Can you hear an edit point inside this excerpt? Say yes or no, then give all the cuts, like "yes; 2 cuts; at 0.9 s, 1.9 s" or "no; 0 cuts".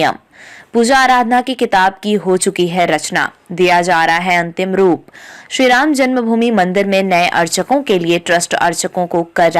no; 0 cuts